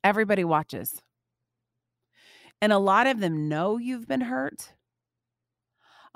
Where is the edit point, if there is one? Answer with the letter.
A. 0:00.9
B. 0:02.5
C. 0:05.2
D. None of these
B